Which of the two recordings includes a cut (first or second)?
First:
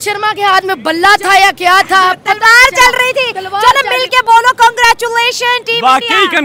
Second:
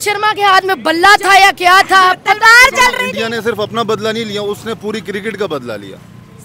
second